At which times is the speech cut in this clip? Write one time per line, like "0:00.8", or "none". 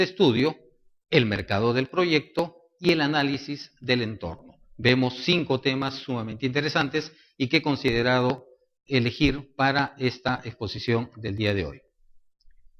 0:04.4